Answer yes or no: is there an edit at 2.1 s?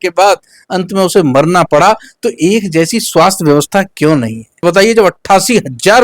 no